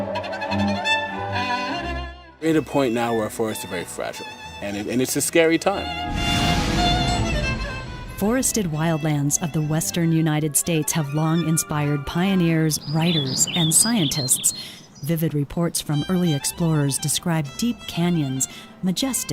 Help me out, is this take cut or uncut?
uncut